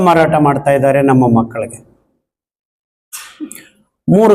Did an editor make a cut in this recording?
no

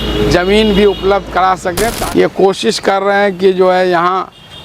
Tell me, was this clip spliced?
yes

